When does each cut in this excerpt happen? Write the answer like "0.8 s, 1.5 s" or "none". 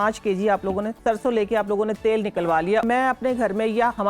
0.9 s, 2.8 s